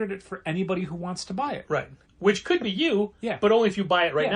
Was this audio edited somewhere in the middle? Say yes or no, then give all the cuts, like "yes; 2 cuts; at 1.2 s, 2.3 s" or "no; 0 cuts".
yes; 1 cut; at 2.1 s